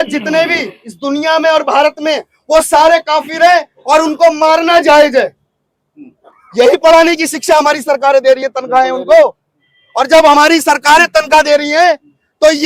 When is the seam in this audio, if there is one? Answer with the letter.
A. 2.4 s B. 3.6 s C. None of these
C